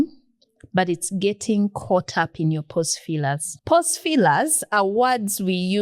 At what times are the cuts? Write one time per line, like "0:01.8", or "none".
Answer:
0:03.5